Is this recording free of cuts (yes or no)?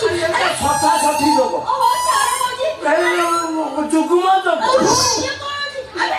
yes